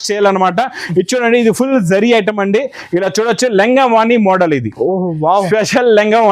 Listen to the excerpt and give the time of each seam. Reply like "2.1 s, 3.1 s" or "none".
none

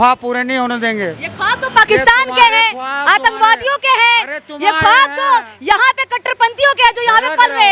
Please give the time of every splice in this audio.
none

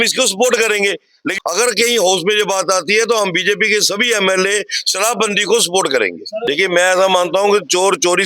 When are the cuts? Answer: 1.3 s, 6.5 s

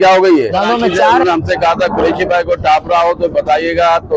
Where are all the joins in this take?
1.2 s

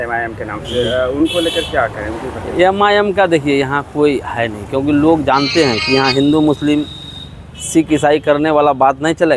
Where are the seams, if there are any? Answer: none

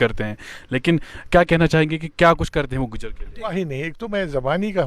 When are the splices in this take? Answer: 3.5 s

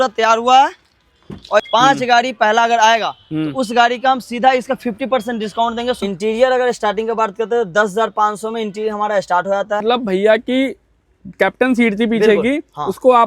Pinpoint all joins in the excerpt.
1.7 s, 6.0 s, 9.8 s

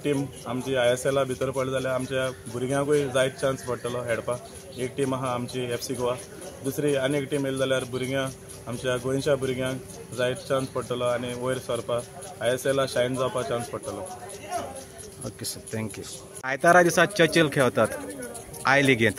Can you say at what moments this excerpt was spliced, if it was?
16.4 s

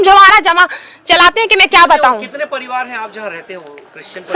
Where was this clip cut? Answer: none

